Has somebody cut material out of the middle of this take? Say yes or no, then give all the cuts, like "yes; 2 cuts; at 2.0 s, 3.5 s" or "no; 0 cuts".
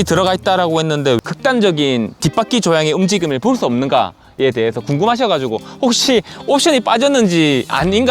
no; 0 cuts